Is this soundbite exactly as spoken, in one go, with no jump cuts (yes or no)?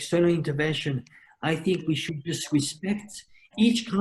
yes